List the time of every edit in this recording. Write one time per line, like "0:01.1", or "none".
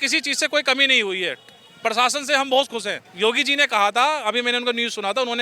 0:03.0